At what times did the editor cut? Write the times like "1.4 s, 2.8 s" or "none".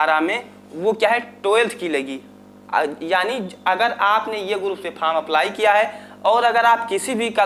none